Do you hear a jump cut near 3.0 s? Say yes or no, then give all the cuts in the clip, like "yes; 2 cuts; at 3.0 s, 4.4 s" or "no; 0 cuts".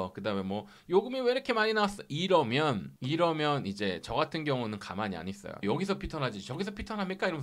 no; 1 cut; at 5.6 s